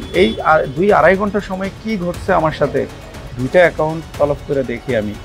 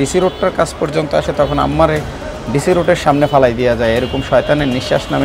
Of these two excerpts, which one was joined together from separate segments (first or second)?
first